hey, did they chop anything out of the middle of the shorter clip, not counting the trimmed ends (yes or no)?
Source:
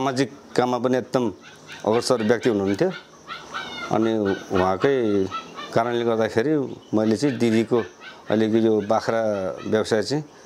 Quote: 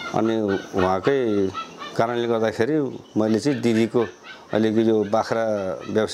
no